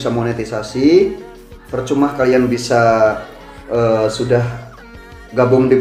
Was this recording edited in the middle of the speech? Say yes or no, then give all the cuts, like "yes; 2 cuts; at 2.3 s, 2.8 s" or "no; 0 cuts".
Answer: no; 0 cuts